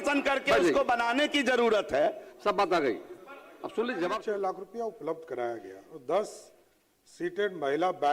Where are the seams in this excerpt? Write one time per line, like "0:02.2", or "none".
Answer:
0:04.2